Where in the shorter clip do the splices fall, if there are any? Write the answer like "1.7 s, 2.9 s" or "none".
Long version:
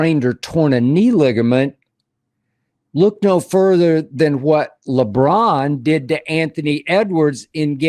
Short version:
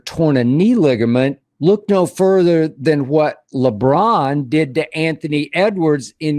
1.5 s